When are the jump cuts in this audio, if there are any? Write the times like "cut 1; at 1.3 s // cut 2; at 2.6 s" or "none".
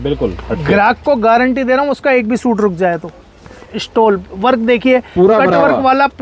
cut 1; at 3.6 s